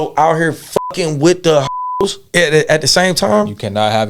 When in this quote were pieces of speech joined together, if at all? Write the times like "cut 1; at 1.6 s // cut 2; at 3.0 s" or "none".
cut 1; at 1.7 s

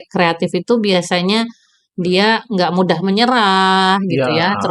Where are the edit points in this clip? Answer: none

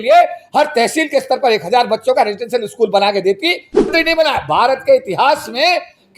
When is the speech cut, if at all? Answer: cut 1; at 3.9 s

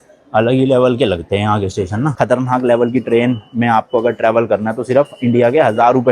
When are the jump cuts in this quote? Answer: cut 1; at 2.1 s

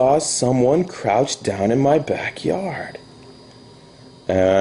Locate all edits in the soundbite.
cut 1; at 1.8 s

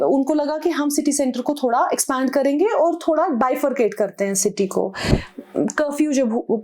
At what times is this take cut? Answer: cut 1; at 5.2 s

